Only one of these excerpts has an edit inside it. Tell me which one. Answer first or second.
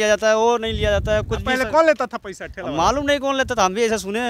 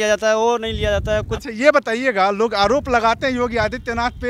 second